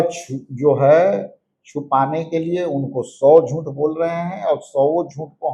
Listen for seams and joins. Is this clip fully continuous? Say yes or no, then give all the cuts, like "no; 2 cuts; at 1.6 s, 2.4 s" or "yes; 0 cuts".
yes; 0 cuts